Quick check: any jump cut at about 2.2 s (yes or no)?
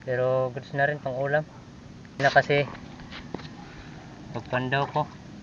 yes